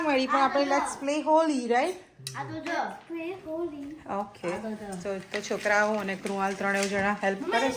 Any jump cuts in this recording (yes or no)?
no